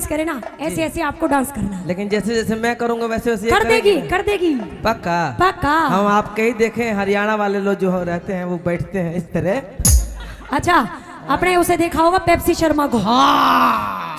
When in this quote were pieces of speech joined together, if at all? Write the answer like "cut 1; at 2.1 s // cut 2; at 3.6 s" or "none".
none